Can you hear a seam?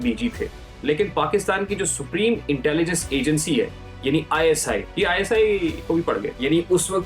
yes; 2 cuts; at 4.9 s, 5.9 s

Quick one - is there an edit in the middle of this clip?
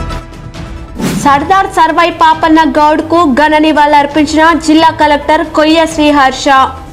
yes; 1 cut; at 1.1 s

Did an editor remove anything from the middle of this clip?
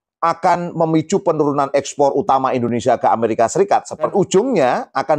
yes; 1 cut; at 4.1 s

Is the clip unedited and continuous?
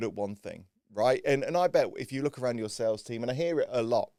yes; 0 cuts

